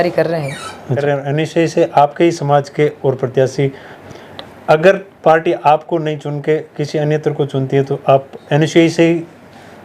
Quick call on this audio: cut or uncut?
cut